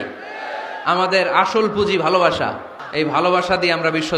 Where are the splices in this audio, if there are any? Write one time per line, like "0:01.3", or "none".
0:02.7